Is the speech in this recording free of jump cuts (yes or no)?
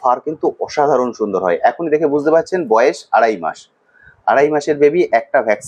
yes